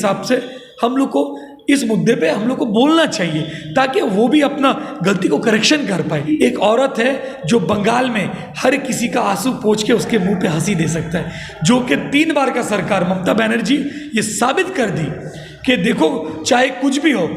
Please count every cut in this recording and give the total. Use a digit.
1